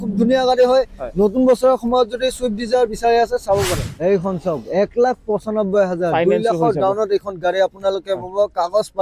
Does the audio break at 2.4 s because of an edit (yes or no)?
no